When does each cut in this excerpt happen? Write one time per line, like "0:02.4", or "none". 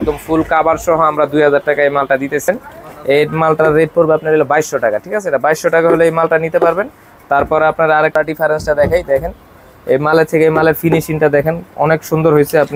0:02.5
0:08.1